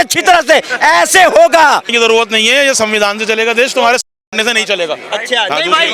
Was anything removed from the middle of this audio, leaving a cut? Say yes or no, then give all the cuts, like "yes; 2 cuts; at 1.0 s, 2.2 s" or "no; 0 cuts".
yes; 1 cut; at 1.9 s